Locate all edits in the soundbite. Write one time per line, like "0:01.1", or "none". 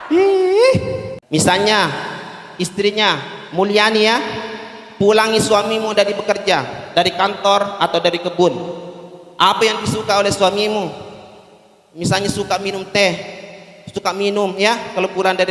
0:01.1